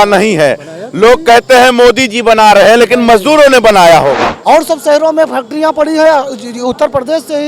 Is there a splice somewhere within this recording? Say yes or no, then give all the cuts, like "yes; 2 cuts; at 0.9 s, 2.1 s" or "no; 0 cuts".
yes; 1 cut; at 4.3 s